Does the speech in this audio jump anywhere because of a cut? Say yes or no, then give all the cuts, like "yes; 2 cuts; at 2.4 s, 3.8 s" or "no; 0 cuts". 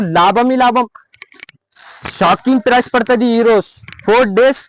no; 0 cuts